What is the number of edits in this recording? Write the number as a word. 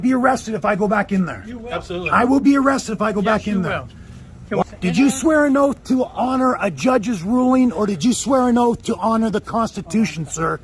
one